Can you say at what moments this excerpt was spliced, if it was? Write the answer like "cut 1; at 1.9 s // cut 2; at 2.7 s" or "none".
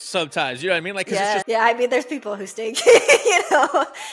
cut 1; at 1.4 s